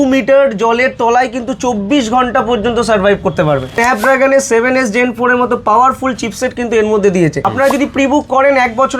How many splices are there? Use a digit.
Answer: 2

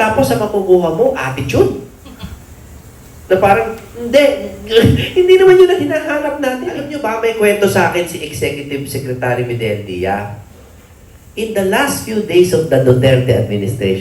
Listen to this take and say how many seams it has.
1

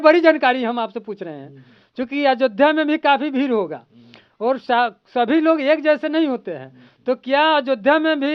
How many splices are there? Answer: 0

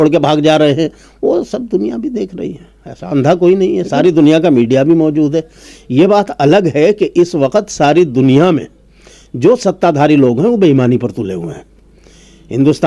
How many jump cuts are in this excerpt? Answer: 0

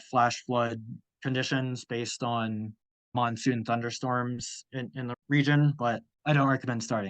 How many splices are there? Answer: 1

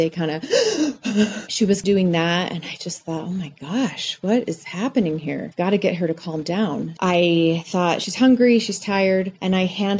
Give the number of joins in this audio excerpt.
2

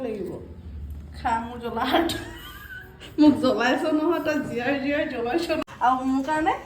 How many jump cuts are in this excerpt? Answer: 1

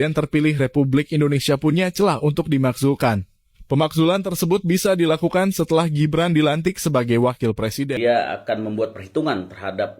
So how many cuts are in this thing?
1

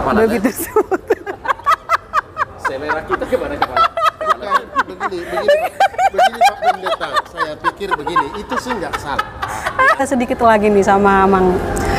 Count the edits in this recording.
1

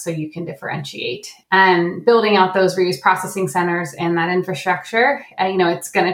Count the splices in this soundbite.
1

